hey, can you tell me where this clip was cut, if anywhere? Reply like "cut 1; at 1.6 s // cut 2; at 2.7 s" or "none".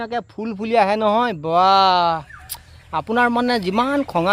none